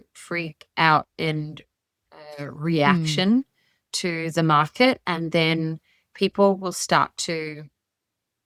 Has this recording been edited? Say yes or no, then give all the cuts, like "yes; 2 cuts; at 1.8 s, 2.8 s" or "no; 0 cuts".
no; 0 cuts